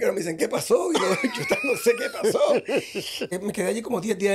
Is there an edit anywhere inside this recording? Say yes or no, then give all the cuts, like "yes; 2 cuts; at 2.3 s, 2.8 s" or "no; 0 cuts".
yes; 1 cut; at 3.3 s